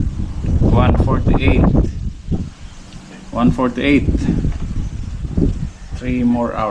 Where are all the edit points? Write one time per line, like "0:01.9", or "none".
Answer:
none